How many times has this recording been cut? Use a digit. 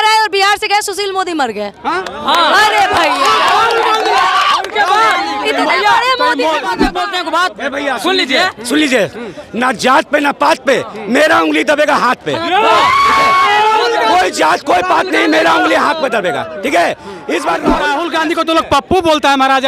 2